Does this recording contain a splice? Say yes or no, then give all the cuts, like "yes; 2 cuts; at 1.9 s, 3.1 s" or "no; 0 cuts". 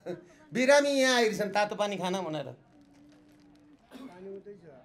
no; 0 cuts